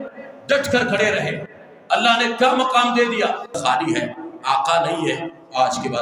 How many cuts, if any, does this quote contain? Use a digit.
1